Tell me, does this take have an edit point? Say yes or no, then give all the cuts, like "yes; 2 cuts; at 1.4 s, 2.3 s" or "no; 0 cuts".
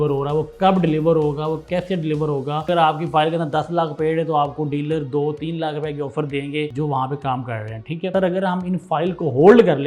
yes; 2 cuts; at 2.6 s, 8.1 s